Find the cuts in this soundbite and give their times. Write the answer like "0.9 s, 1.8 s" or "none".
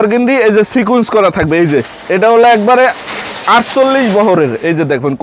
none